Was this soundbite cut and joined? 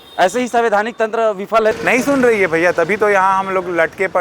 yes; 1 cut; at 1.8 s

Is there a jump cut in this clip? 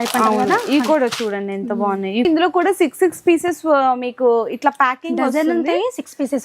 yes; 1 cut; at 2.2 s

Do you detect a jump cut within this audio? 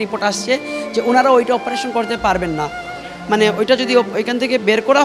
no; 0 cuts

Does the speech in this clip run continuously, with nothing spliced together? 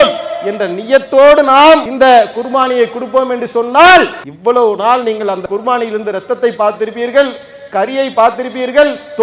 no; 3 cuts; at 1.9 s, 4.2 s, 5.4 s

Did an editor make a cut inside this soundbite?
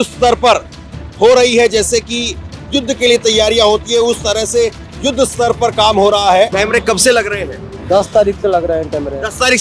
yes; 2 cuts; at 6.5 s, 7.7 s

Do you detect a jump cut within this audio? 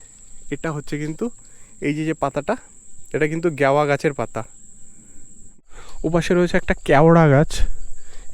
yes; 1 cut; at 5.5 s

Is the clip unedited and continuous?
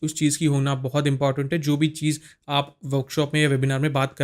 yes; 0 cuts

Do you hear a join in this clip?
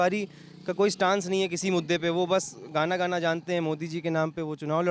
no; 0 cuts

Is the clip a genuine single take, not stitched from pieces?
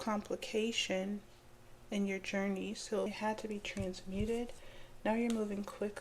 no; 1 cut; at 3.1 s

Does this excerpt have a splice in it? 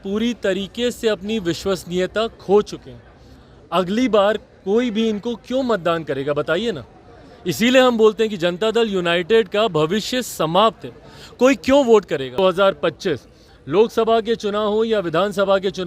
yes; 1 cut; at 12.4 s

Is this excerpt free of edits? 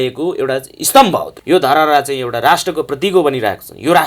no; 1 cut; at 1.3 s

